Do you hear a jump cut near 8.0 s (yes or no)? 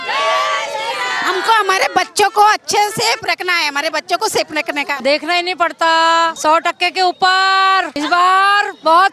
yes